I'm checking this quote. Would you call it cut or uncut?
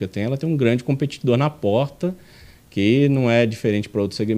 uncut